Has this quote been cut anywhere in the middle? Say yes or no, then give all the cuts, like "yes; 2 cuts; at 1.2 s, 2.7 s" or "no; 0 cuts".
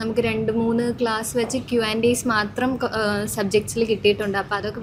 no; 0 cuts